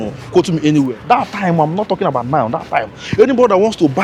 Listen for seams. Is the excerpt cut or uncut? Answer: cut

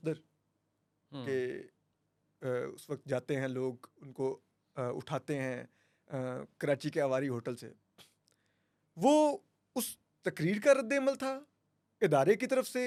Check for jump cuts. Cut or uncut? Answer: uncut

